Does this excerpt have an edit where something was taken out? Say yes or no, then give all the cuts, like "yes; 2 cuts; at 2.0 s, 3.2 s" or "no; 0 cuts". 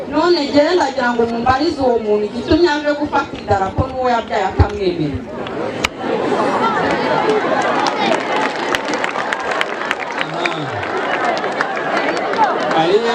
no; 0 cuts